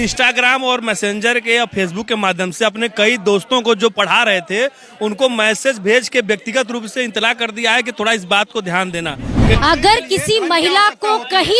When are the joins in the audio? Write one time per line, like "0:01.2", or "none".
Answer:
0:09.6